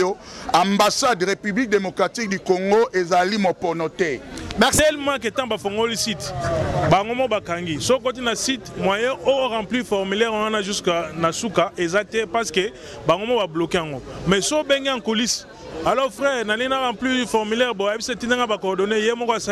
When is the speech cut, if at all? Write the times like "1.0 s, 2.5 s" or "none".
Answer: 4.8 s